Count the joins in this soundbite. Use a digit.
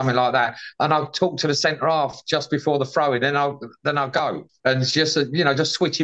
1